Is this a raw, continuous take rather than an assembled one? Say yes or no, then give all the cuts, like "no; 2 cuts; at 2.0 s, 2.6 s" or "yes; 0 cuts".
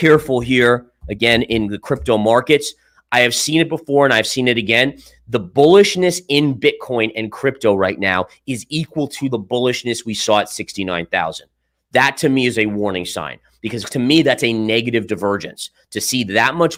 yes; 0 cuts